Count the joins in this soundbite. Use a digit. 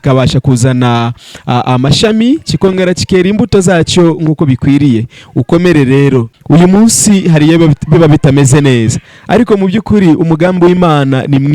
1